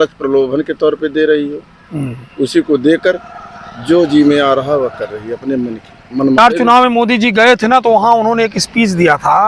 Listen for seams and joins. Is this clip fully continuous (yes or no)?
no